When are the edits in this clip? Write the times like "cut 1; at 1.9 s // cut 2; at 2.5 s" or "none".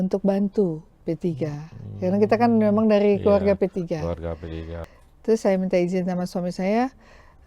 cut 1; at 4.8 s

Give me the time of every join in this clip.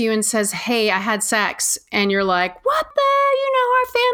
cut 1; at 2.9 s

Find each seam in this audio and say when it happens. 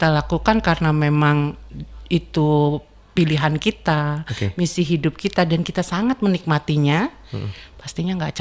none

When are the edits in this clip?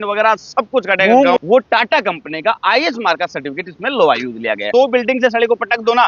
cut 1; at 1.4 s // cut 2; at 4.7 s

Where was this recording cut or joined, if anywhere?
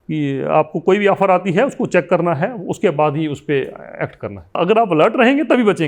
cut 1; at 4.5 s

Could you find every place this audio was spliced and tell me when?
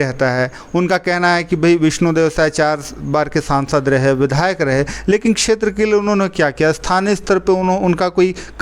none

